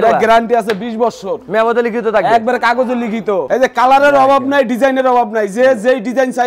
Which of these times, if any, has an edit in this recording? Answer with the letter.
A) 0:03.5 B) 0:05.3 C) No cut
A